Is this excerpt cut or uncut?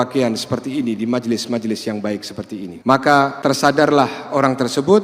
cut